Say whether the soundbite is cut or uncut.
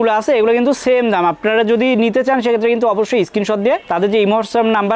uncut